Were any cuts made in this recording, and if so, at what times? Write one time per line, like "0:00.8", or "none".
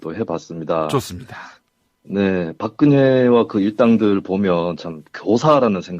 0:02.7